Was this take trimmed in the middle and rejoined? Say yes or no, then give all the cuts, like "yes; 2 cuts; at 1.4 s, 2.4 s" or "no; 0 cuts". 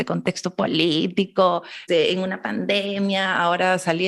yes; 1 cut; at 1.8 s